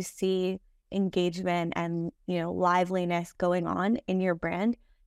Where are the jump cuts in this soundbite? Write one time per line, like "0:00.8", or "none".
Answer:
none